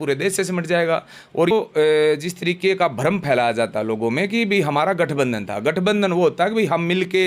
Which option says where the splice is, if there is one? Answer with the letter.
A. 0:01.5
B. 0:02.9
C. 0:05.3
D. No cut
A